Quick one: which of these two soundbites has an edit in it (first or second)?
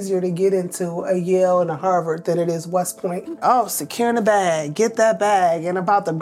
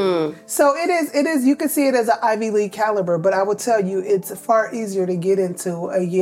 first